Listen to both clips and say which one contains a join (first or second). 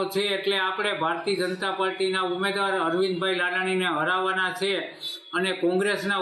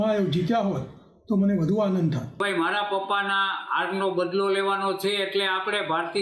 second